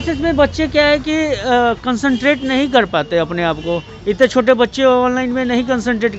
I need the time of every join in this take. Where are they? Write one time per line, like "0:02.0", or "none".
none